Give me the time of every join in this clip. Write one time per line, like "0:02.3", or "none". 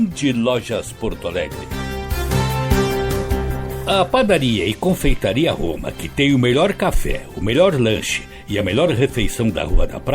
0:01.6
0:03.5